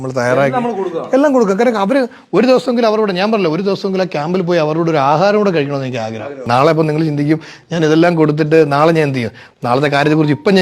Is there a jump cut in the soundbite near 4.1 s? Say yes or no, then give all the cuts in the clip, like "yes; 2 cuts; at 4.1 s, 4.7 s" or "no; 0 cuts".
no; 1 cut; at 6.4 s